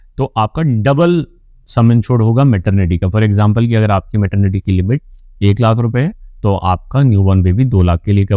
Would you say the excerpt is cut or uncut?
uncut